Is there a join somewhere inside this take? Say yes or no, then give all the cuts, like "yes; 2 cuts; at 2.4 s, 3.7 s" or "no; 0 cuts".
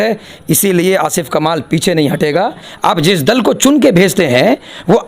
yes; 1 cut; at 2.6 s